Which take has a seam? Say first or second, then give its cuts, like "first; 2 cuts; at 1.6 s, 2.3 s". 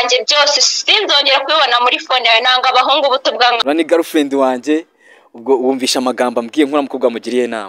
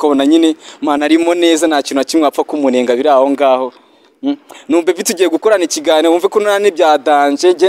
first; 1 cut; at 3.6 s